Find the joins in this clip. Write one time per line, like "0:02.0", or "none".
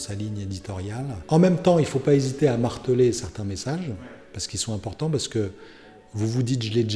0:01.2